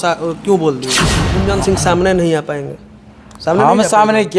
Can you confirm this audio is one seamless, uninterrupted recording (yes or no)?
no